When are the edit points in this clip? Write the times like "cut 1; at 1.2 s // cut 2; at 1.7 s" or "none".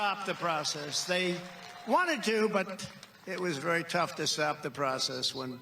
cut 1; at 1.2 s

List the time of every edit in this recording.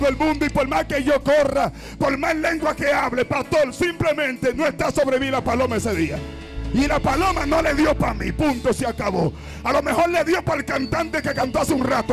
none

